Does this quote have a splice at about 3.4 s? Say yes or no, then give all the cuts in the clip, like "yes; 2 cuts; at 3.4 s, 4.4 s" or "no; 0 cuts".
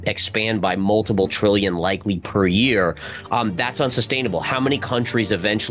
no; 0 cuts